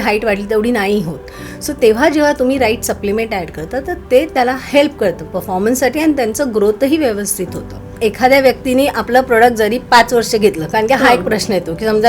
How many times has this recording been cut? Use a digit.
1